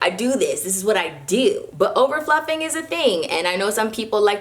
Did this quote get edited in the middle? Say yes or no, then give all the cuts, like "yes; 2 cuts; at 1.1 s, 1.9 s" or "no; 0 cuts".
yes; 1 cut; at 1.7 s